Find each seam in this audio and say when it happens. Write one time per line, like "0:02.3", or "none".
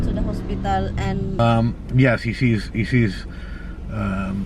0:01.4